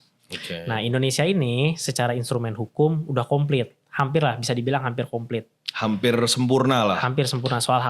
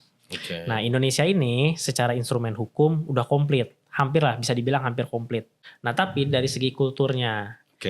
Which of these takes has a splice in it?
second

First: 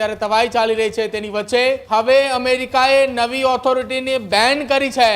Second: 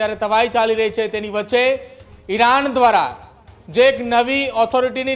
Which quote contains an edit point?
first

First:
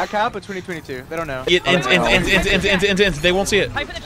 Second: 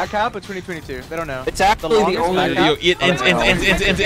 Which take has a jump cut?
first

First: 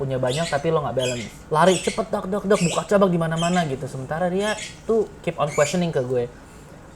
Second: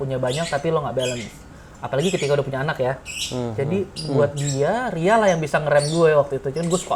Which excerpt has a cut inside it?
first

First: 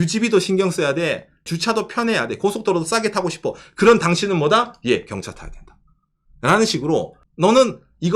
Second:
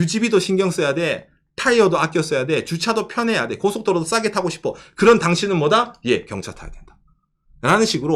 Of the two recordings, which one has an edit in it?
first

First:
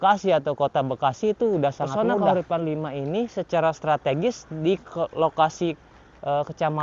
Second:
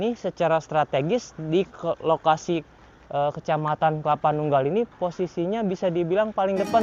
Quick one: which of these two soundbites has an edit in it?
first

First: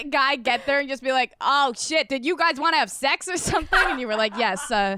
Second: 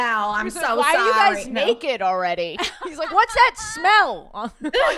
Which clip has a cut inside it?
first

